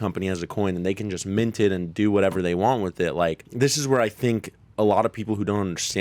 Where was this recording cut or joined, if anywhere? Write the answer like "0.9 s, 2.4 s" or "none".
3.4 s

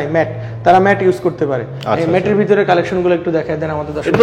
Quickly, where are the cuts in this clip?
none

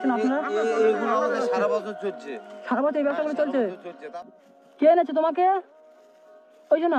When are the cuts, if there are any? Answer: 3.9 s

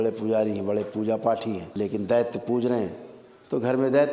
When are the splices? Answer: 1.7 s

